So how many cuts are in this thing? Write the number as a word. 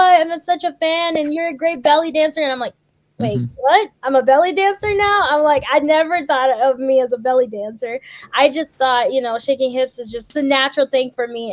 one